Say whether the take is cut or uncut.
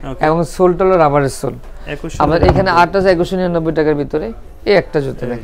uncut